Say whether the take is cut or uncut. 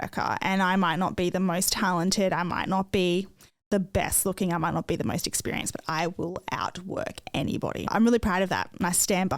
cut